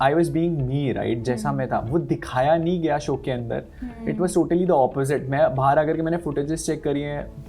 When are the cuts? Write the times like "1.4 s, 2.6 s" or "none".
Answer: none